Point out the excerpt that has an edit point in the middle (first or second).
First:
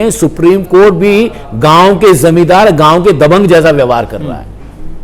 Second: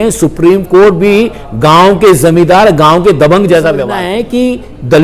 second